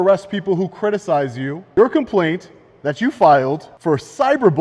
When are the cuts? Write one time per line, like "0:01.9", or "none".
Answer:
0:01.5
0:03.7